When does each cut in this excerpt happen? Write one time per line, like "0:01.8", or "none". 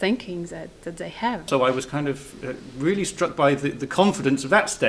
0:01.5